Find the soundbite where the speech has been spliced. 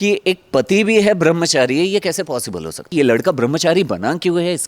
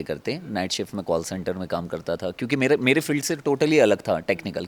first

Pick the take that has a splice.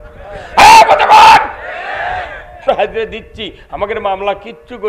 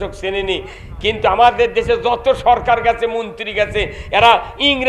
first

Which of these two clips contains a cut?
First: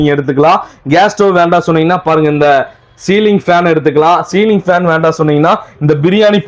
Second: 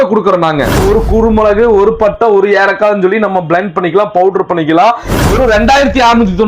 second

